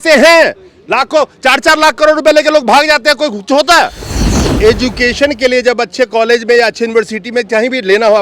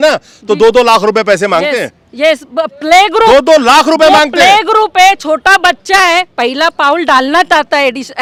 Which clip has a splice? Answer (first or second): first